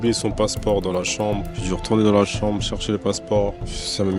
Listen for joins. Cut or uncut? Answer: uncut